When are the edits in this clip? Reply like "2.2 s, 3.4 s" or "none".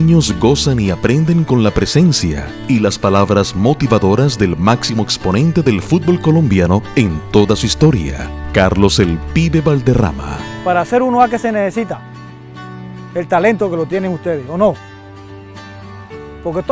15.8 s